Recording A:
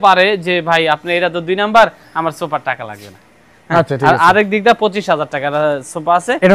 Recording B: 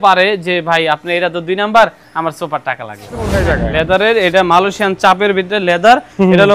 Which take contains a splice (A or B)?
B